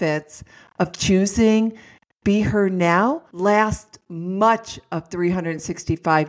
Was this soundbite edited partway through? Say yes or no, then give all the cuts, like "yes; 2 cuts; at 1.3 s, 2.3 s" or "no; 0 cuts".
no; 0 cuts